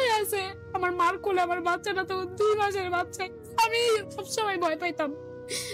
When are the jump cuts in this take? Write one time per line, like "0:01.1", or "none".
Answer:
0:03.2
0:04.2